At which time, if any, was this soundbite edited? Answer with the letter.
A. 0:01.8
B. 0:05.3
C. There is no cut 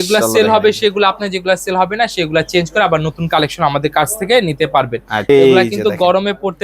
B